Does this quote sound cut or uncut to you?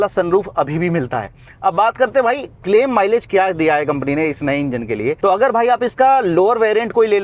uncut